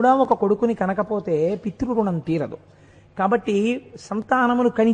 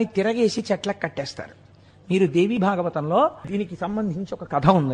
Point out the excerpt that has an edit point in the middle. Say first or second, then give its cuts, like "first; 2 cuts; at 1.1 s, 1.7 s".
second; 1 cut; at 3.5 s